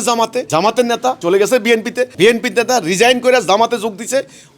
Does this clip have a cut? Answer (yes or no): yes